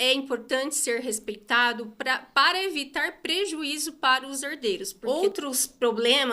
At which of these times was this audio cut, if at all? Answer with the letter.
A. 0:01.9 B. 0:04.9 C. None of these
B